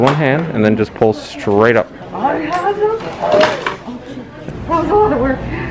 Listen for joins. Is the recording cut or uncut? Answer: cut